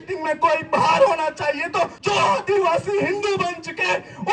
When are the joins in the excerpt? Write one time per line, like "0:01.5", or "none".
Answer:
0:02.0

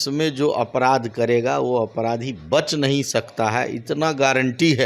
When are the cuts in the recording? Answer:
none

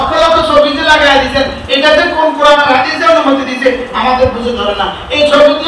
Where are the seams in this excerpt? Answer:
none

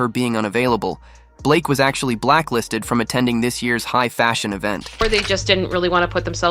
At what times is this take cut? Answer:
0:04.9

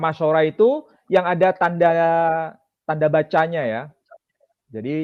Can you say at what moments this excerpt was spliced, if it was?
none

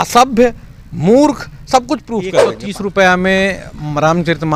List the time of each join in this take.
0:02.5

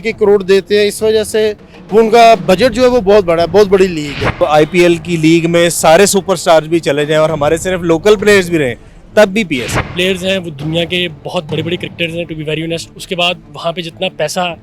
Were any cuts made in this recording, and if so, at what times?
0:04.4
0:09.9

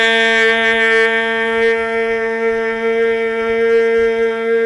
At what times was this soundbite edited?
none

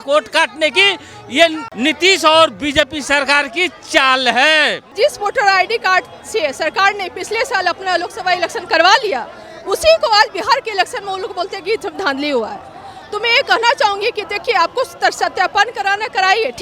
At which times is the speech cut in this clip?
0:01.7
0:04.8

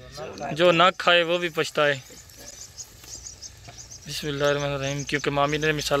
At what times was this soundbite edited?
none

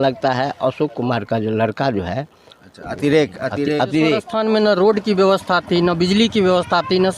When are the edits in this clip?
0:04.3

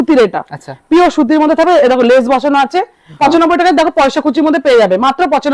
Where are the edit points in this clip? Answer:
0:03.1

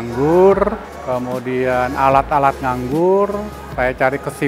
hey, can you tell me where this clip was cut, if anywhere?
0:00.9
0:03.6

